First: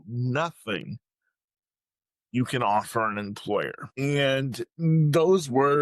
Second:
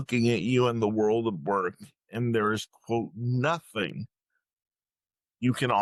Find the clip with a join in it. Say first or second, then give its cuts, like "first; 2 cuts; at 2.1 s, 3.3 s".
first; 1 cut; at 3.8 s